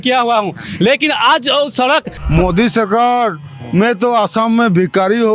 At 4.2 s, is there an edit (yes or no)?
no